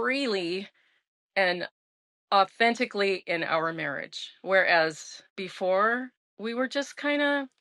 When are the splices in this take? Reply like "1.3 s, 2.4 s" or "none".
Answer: none

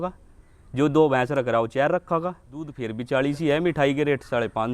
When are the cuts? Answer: 2.9 s

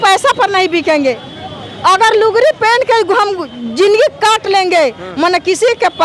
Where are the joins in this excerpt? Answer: none

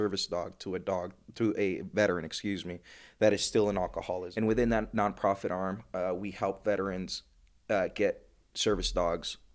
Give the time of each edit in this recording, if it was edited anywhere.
4.2 s

